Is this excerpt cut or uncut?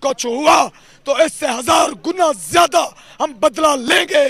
uncut